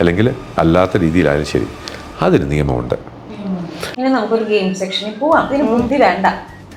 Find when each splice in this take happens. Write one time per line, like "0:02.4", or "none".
0:03.8
0:05.5